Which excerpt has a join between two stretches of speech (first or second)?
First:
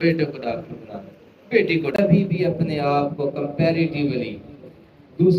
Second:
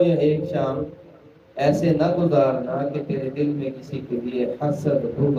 first